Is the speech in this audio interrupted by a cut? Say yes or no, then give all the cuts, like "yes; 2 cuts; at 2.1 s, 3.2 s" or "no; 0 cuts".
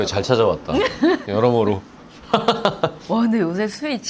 yes; 1 cut; at 3.0 s